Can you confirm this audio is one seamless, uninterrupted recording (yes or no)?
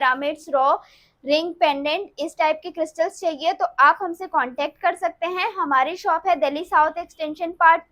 yes